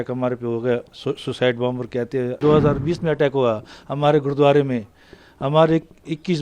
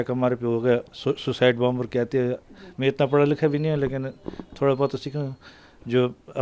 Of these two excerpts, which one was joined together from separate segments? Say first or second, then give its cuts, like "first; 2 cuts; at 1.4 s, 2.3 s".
first; 1 cut; at 2.4 s